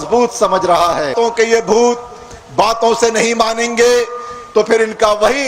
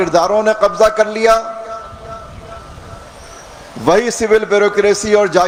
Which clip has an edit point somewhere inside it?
first; 1 cut; at 1.1 s

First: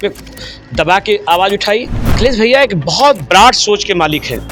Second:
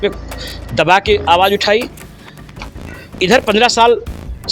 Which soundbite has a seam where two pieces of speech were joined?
first; 1 cut; at 2.1 s

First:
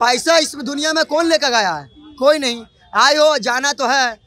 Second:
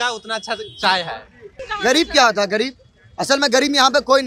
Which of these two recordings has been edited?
second; 1 cut; at 1.7 s

